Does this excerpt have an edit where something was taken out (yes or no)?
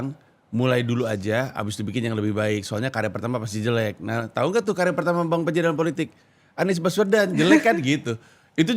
no